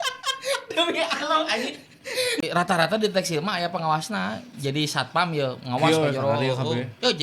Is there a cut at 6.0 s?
no; 1 cut; at 2.4 s

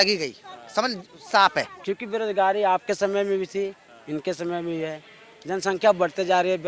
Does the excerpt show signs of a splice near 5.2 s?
no; 1 cut; at 1.7 s

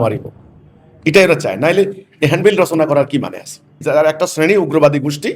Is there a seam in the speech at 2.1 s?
no; 1 cut; at 3.7 s

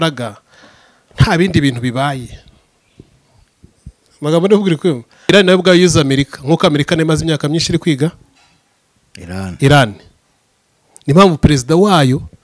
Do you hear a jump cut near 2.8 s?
no; 1 cut; at 5.3 s

